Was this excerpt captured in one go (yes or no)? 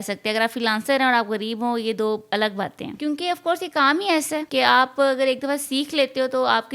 no